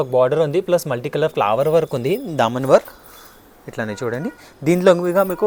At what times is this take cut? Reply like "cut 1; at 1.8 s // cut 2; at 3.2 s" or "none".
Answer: none